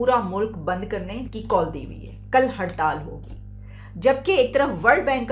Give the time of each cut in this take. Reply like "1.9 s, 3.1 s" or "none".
1.3 s